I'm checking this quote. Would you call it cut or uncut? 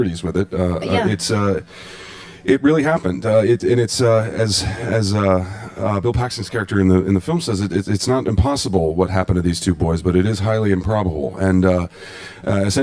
cut